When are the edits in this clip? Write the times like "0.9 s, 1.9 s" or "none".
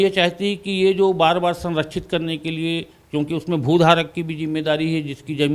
none